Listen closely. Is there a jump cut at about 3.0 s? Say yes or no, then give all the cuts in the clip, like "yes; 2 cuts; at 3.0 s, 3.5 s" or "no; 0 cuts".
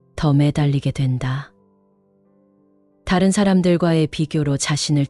yes; 2 cuts; at 1.5 s, 3.0 s